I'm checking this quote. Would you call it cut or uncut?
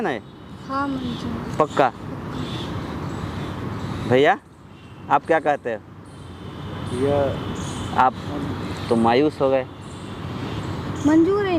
uncut